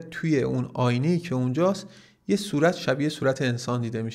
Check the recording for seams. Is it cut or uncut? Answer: uncut